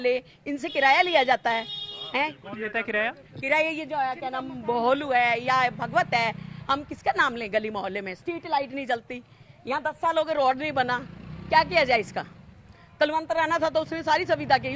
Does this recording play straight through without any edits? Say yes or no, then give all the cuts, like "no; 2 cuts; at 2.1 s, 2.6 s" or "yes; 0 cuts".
yes; 0 cuts